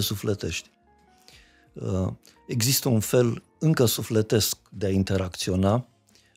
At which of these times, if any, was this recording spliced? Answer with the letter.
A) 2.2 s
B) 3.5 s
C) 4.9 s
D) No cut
D